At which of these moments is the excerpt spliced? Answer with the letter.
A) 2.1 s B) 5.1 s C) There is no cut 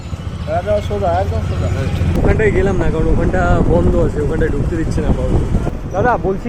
A